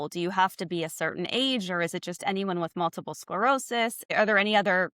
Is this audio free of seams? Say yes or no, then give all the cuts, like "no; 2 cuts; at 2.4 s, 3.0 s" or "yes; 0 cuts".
yes; 0 cuts